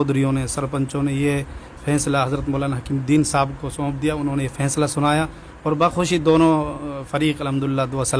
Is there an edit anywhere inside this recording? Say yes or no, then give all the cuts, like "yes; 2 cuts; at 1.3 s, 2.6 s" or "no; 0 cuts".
no; 0 cuts